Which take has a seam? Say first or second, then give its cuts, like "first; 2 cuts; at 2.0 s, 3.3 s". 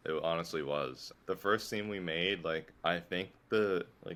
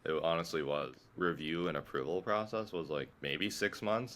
second; 1 cut; at 1.0 s